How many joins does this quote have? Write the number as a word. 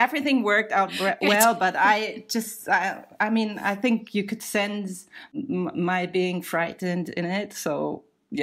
one